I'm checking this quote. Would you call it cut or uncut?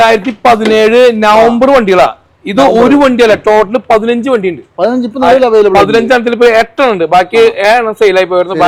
uncut